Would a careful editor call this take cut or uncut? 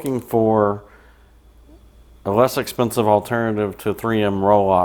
uncut